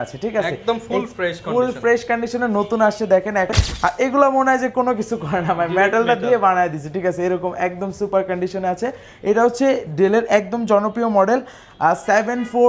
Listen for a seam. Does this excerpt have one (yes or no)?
yes